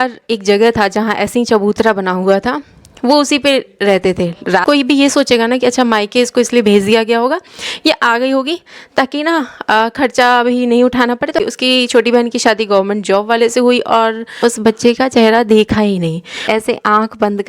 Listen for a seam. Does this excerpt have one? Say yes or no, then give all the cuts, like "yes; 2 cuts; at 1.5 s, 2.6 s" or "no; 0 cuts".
yes; 4 cuts; at 4.6 s, 11.4 s, 14.4 s, 16.4 s